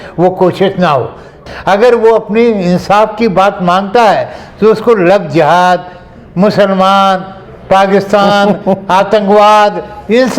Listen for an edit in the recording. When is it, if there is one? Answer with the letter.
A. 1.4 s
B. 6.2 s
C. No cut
A